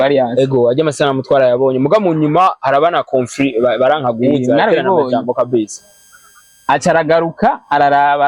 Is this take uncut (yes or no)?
yes